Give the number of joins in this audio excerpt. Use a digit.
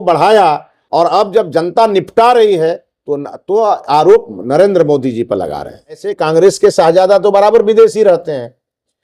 1